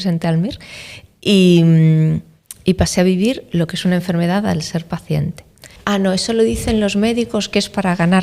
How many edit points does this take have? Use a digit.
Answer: 1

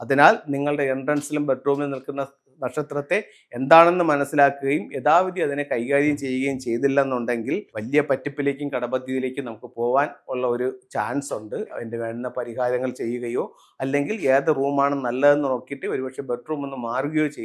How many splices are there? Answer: 2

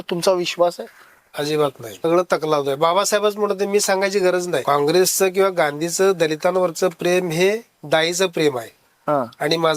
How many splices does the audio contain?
2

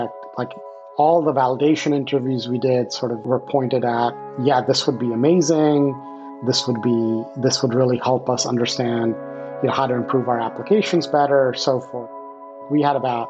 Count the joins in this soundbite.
2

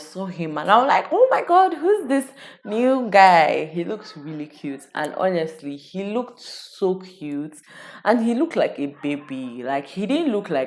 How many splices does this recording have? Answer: 0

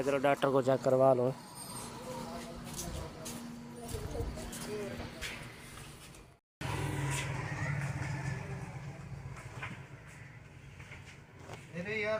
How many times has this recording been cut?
0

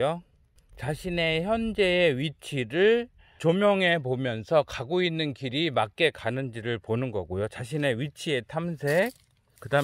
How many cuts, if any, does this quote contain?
1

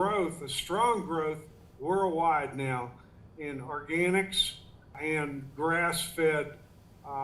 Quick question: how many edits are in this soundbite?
1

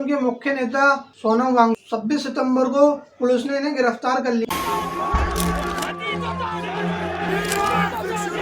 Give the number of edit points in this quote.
2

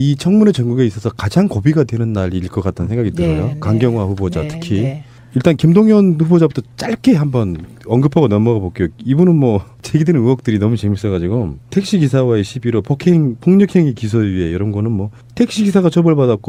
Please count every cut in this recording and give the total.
0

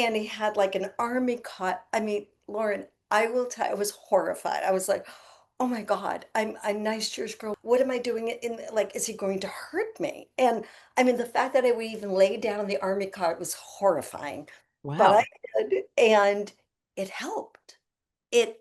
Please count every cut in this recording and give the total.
1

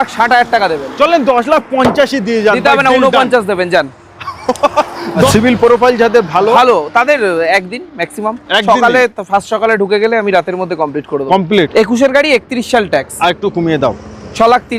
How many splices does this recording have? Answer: 2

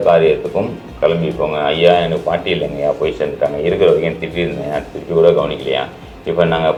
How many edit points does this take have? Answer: 0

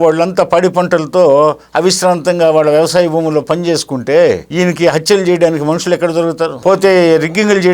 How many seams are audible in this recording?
1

